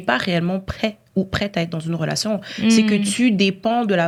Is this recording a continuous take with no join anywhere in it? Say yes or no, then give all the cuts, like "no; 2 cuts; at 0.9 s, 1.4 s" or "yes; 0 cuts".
yes; 0 cuts